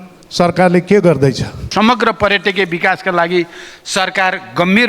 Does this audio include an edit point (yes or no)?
yes